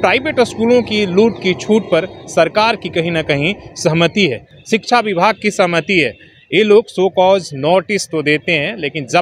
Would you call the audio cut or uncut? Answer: uncut